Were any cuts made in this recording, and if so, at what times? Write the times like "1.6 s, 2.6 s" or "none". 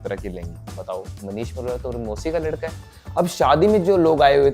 2.8 s